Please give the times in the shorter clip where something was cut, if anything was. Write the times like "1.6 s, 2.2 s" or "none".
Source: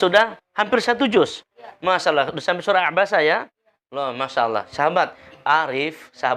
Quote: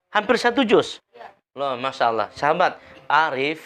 1.2 s